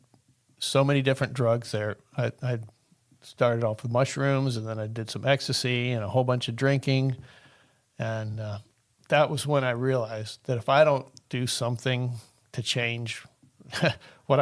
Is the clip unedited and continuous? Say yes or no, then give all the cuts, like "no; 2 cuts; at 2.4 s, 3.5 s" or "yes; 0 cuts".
yes; 0 cuts